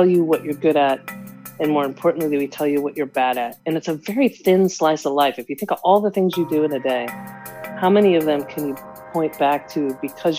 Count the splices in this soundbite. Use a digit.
0